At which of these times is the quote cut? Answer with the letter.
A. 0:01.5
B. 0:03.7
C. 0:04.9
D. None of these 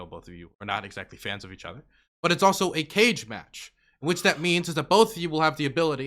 D